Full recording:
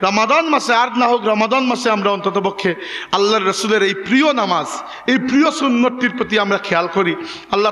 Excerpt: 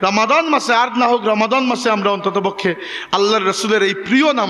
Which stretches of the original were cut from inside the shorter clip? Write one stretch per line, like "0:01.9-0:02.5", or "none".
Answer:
none